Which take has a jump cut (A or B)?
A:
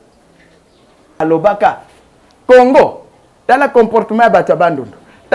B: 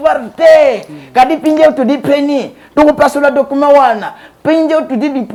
A